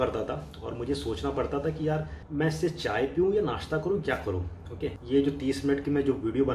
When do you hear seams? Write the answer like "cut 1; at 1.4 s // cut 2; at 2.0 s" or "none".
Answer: cut 1; at 2.2 s // cut 2; at 4.9 s